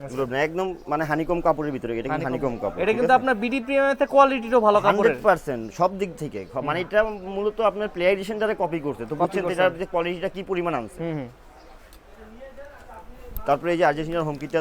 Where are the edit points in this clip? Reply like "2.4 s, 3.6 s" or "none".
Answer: none